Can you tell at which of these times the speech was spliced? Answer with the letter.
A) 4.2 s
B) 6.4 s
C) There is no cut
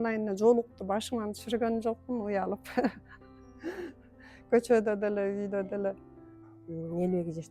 B